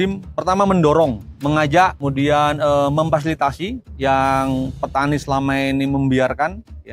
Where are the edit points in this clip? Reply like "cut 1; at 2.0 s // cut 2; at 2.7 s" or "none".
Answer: cut 1; at 1.3 s // cut 2; at 2.0 s // cut 3; at 3.8 s